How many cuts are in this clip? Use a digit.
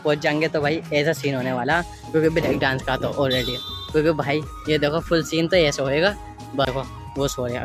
1